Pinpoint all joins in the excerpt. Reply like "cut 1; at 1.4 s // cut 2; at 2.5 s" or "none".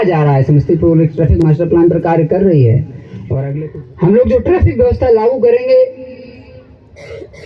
cut 1; at 3.4 s